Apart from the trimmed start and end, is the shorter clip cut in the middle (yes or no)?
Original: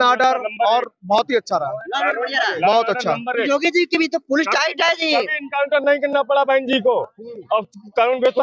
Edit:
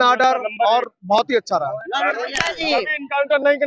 yes